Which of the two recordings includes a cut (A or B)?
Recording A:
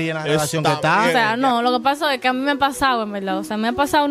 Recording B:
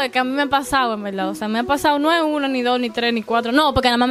A